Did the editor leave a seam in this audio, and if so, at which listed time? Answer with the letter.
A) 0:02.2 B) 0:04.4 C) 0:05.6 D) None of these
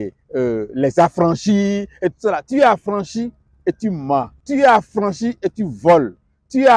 B